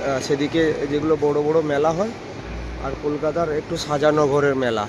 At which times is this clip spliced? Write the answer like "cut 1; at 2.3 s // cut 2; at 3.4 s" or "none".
none